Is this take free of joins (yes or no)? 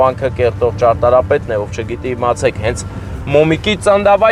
yes